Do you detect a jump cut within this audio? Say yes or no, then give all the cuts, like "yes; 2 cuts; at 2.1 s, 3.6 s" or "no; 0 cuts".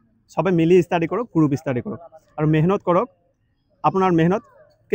no; 0 cuts